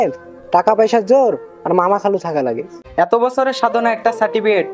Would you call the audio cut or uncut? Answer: cut